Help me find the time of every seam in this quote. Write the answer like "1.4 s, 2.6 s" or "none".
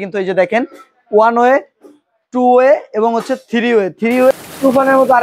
4.3 s